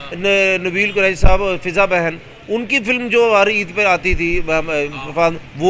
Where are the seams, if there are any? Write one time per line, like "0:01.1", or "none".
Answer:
none